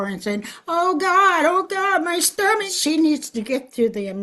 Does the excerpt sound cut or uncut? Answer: cut